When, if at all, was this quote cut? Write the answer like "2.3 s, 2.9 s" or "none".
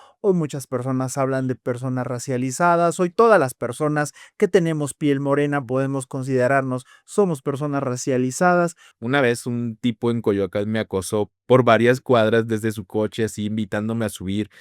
8.9 s

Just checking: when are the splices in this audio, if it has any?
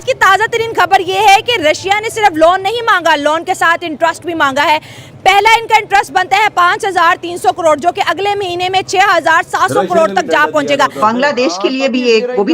11.0 s

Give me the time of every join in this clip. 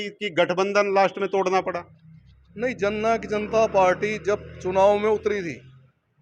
none

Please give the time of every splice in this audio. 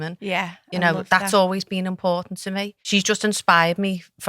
2.8 s

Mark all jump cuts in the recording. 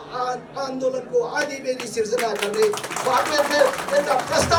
none

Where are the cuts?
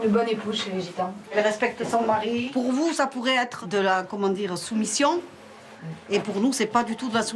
1.2 s, 2.5 s, 3.6 s

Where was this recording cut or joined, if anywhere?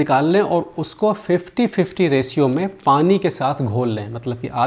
none

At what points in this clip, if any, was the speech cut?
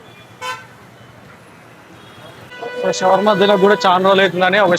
2.5 s

